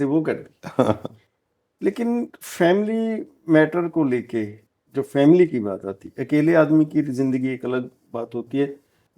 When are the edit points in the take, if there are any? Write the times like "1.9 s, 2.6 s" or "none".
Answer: none